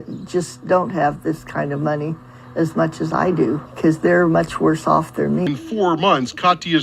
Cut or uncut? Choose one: cut